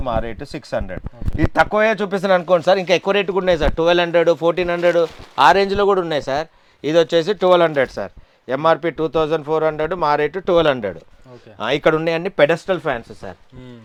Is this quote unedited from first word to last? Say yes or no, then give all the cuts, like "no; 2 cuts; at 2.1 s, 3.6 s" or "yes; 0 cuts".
yes; 0 cuts